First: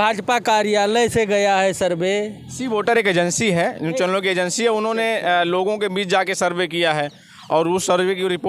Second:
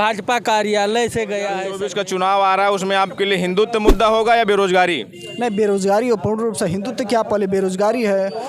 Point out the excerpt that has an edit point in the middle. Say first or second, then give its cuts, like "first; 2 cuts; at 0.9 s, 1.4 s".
second; 1 cut; at 1.7 s